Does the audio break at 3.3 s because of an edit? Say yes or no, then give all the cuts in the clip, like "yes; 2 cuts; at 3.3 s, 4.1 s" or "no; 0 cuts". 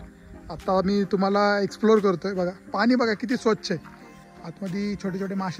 no; 0 cuts